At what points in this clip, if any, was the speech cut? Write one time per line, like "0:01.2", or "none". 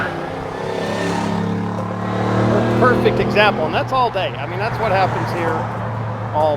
none